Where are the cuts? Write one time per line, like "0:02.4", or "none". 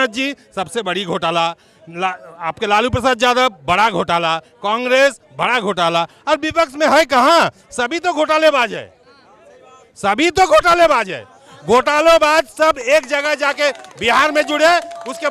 none

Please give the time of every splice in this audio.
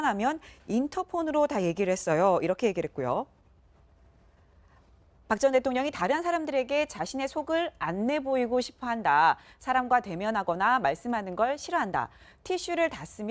0:09.0

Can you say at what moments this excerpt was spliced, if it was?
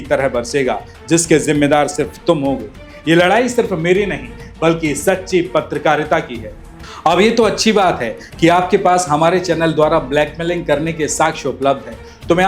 0:06.8

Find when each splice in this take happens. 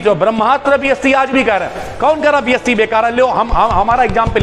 none

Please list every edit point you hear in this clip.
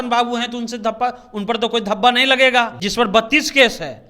0:02.8

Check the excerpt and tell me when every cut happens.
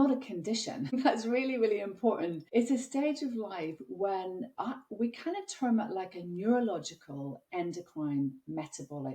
0:01.0
0:02.4

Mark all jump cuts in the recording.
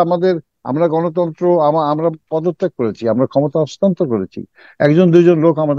none

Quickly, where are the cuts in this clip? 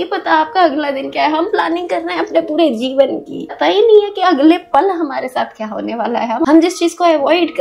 0:03.5
0:06.5

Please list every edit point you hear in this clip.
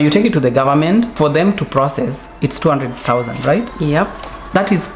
0:03.7

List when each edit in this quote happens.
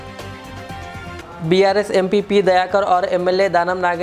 none

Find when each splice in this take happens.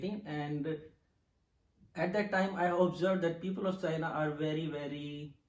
none

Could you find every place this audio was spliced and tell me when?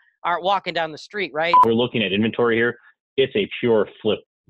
0:01.6

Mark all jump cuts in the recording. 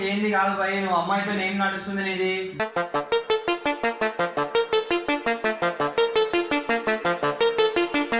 none

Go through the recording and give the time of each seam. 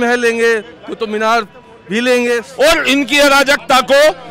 0:02.5

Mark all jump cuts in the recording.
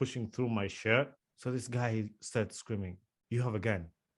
0:01.2

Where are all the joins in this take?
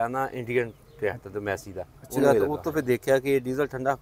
0:02.2

